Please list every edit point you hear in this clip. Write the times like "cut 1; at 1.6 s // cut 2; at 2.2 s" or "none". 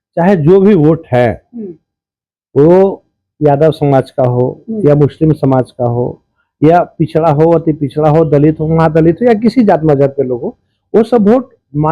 none